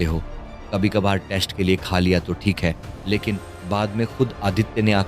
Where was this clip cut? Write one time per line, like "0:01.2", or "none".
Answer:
0:03.5